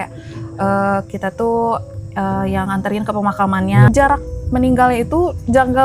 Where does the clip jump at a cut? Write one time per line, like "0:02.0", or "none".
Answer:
0:03.9